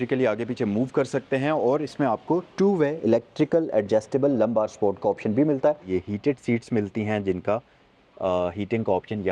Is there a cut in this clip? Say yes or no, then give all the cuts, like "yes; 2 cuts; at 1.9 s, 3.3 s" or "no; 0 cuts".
yes; 1 cut; at 5.9 s